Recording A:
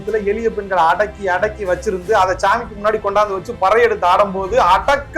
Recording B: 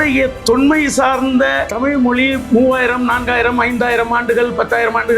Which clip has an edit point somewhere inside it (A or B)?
B